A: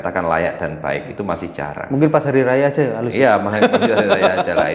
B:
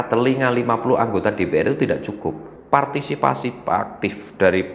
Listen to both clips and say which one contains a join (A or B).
B